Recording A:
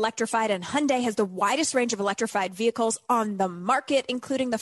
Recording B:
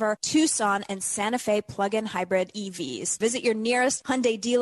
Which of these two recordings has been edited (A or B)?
B